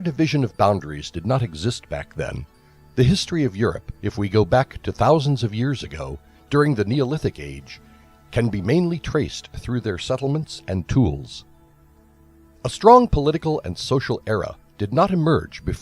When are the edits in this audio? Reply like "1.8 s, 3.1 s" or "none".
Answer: 13.8 s

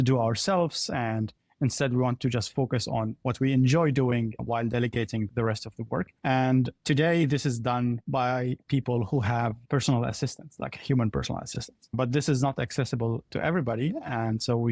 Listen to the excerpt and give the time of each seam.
none

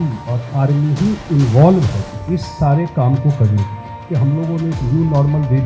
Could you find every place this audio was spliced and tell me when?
2.1 s, 4.0 s

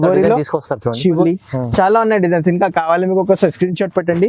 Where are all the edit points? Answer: 1.2 s

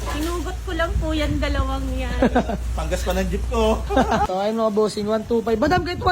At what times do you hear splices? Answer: 4.3 s

